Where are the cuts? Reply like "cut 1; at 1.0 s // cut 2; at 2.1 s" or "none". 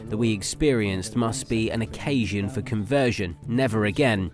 none

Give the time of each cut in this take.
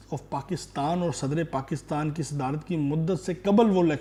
none

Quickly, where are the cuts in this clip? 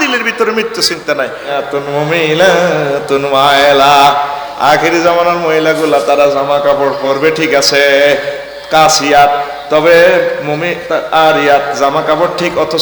cut 1; at 1.7 s

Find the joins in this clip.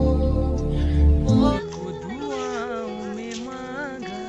cut 1; at 1.5 s

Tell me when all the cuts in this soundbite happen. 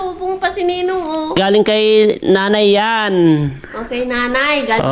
cut 1; at 1.4 s

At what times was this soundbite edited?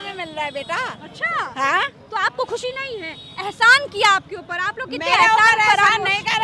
none

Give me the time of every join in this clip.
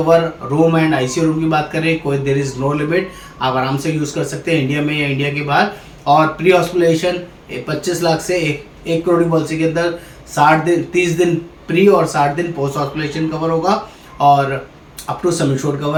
none

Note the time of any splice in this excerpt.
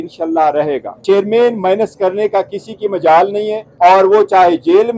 cut 1; at 0.9 s // cut 2; at 3.6 s

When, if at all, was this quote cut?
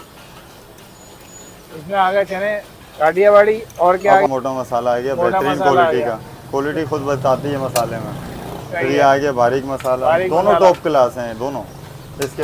cut 1; at 4.3 s

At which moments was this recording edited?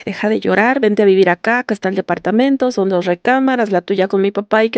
none

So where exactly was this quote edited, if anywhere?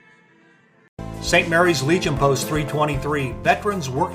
cut 1; at 0.9 s

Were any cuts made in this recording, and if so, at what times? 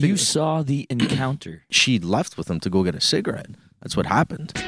cut 1; at 1.8 s

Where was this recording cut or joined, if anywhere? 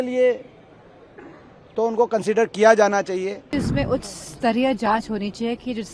cut 1; at 3.5 s

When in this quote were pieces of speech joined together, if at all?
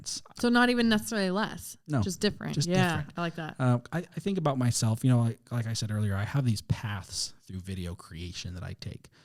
none

